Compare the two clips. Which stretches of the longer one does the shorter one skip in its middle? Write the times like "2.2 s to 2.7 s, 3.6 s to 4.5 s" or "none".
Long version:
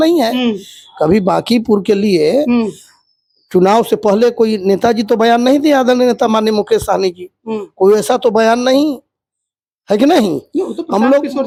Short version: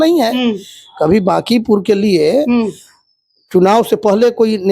none